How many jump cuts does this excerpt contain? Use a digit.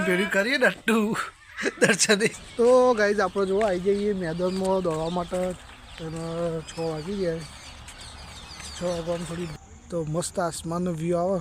2